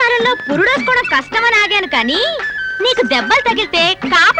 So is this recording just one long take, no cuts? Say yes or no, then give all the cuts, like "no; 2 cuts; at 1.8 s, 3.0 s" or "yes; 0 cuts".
yes; 0 cuts